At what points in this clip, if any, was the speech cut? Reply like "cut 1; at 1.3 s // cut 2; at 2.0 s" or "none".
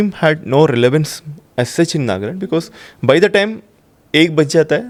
none